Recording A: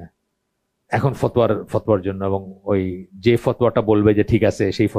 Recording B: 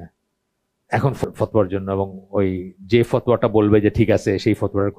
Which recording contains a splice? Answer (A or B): B